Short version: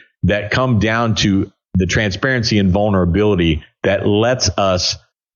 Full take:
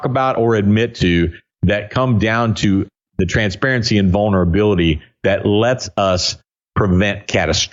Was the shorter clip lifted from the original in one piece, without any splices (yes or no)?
yes